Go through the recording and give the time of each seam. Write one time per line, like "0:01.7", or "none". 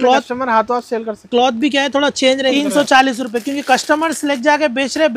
0:02.4